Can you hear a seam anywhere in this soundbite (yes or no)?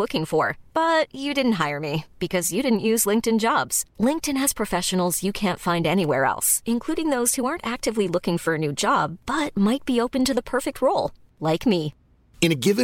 no